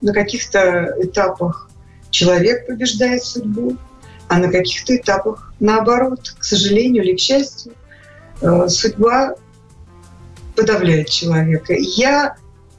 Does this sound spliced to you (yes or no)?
no